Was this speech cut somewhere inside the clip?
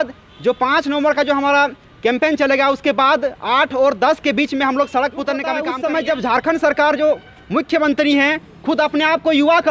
yes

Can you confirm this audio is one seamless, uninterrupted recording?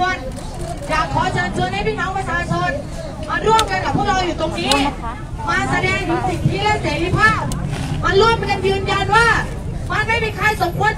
yes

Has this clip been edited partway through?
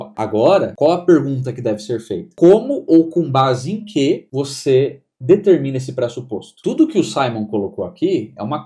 yes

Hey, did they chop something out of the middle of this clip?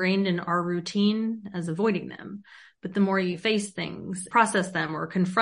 yes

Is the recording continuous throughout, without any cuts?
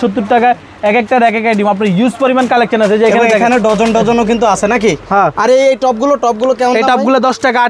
yes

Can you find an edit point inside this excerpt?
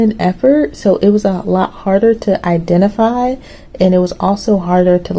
no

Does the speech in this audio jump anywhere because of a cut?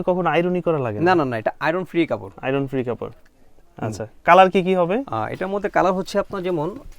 no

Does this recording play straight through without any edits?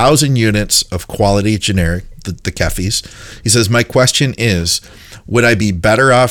yes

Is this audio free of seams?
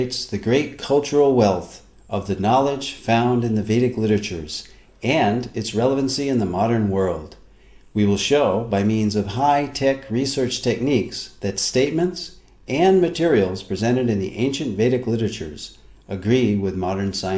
yes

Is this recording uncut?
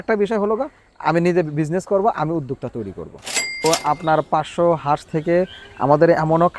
no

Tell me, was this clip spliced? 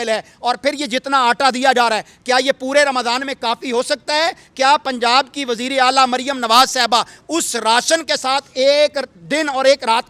no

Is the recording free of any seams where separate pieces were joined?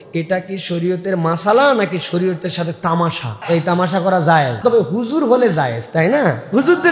no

